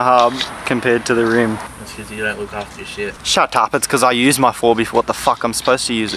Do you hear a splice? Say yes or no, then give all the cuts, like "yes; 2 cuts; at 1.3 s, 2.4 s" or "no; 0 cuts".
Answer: yes; 2 cuts; at 1.7 s, 3.2 s